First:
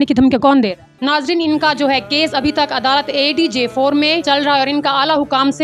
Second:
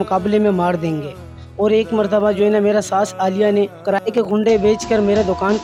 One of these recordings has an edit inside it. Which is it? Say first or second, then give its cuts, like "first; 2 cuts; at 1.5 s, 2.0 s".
first; 1 cut; at 1.0 s